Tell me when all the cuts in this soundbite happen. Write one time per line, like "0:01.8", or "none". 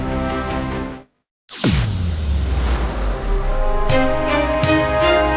0:01.6